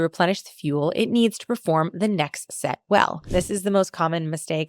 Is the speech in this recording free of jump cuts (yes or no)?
no